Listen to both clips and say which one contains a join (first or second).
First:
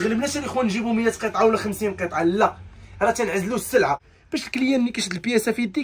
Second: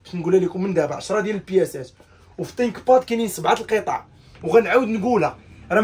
first